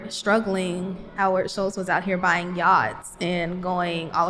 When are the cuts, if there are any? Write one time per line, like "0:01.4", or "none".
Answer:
0:01.0